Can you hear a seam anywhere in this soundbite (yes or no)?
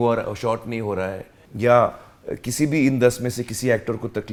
no